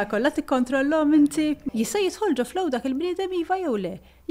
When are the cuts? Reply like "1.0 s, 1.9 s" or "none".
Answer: 1.6 s